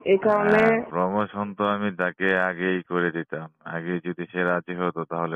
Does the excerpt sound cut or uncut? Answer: uncut